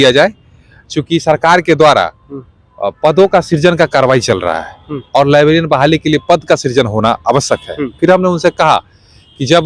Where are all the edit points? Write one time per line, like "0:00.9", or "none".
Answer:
none